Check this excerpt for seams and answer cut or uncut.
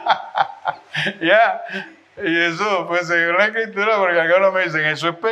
uncut